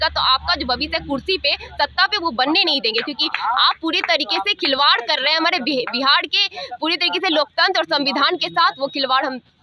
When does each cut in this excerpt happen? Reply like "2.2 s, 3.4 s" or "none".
none